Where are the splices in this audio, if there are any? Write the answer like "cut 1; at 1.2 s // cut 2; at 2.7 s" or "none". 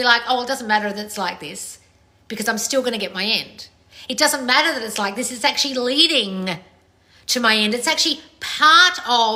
none